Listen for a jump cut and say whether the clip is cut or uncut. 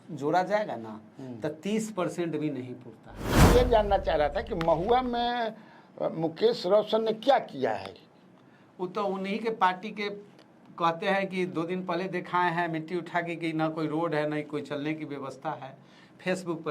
cut